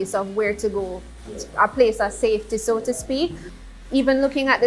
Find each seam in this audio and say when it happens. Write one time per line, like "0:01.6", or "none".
0:03.5